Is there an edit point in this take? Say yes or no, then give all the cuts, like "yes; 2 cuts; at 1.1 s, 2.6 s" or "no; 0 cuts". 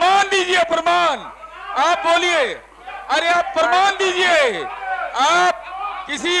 no; 0 cuts